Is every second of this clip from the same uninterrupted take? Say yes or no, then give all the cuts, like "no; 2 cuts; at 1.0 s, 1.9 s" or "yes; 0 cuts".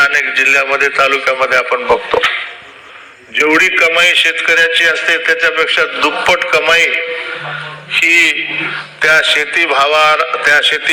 yes; 0 cuts